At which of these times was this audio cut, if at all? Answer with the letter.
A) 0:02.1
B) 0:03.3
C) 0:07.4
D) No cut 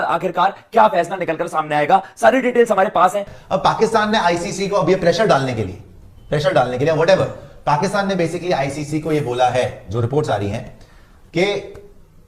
B